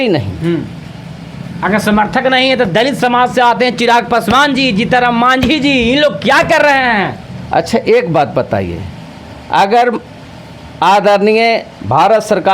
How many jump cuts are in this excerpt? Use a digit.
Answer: 0